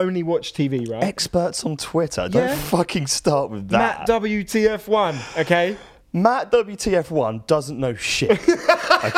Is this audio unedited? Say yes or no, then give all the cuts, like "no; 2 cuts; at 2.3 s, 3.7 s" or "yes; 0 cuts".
yes; 0 cuts